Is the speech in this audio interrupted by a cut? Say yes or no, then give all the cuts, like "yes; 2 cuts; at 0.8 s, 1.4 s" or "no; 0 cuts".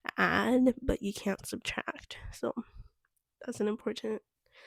no; 0 cuts